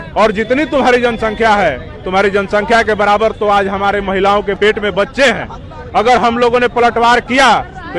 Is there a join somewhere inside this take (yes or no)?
yes